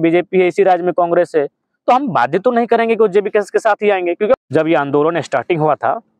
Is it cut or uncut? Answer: cut